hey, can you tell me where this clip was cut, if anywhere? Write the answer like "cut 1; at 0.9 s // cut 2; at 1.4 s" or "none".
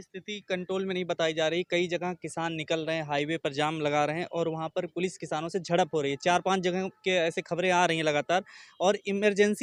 none